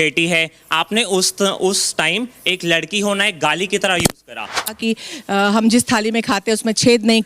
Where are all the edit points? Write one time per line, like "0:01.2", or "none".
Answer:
0:04.8